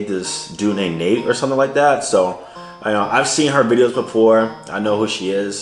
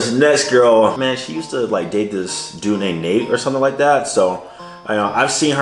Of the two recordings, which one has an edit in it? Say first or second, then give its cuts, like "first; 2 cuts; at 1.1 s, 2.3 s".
second; 1 cut; at 1.0 s